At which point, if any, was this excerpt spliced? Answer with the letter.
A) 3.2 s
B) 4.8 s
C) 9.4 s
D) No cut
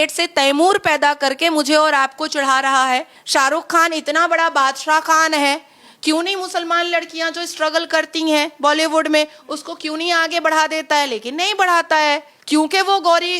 A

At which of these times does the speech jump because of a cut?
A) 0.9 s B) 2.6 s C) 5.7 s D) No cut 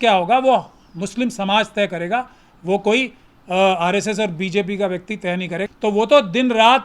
C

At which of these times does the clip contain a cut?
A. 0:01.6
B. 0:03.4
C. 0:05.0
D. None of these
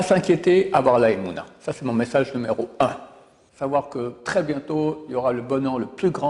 B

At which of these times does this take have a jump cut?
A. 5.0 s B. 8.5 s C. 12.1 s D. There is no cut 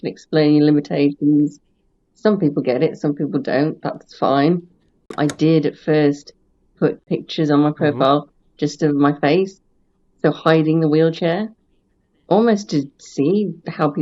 A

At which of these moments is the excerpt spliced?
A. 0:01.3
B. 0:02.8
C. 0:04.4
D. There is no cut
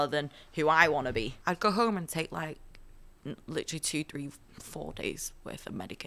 A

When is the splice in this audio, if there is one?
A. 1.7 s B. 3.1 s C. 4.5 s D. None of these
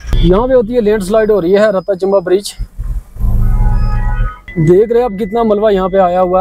C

